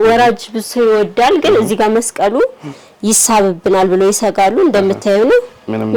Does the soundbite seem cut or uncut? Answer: uncut